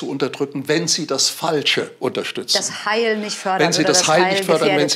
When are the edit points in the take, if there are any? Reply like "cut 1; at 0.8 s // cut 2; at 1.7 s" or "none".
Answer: none